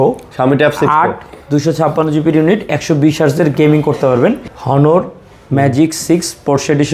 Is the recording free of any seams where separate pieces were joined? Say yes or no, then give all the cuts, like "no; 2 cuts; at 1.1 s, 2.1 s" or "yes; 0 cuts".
no; 1 cut; at 4.4 s